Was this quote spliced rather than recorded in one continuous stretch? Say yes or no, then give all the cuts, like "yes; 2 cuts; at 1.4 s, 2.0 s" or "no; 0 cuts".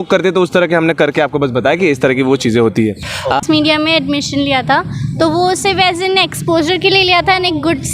yes; 1 cut; at 3.2 s